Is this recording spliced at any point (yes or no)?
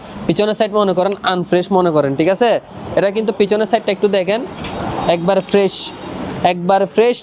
no